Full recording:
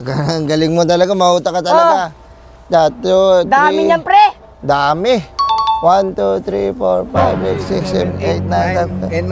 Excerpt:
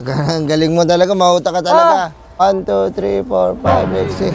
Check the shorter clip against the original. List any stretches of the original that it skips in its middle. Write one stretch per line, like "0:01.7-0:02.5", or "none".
0:02.4-0:05.9